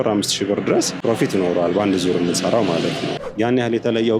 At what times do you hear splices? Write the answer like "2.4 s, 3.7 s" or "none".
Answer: 0.9 s, 3.1 s